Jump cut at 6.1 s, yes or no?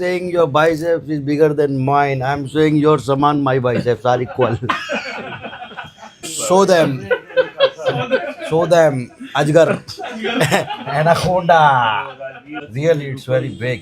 yes